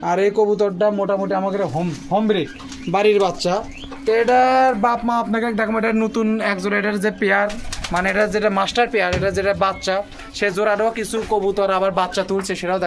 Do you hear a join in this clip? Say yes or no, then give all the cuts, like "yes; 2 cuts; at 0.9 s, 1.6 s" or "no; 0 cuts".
no; 0 cuts